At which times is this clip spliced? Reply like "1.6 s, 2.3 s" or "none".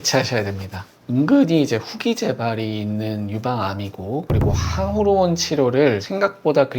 0.9 s